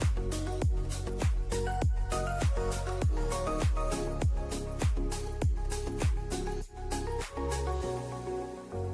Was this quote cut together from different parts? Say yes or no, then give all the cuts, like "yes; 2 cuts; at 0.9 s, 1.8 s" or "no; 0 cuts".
no; 0 cuts